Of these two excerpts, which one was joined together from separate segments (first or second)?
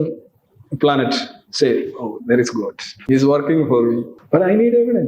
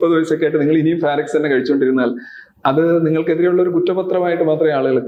first